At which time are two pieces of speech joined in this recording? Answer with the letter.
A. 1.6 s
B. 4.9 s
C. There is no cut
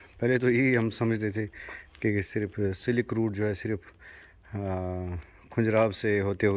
C